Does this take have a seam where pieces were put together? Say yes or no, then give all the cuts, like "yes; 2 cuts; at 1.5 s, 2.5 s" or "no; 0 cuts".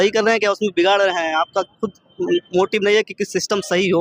no; 0 cuts